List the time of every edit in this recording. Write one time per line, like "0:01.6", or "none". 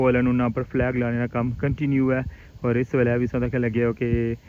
none